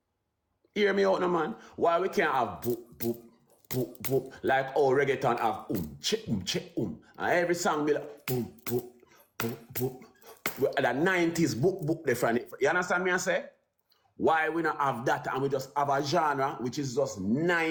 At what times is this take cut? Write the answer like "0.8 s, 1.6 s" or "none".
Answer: none